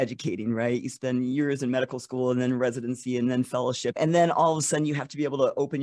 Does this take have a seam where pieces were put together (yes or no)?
yes